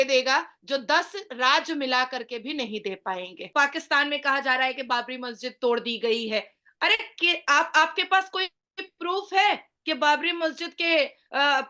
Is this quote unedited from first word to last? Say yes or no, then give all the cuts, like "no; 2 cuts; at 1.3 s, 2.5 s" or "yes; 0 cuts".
no; 1 cut; at 3.4 s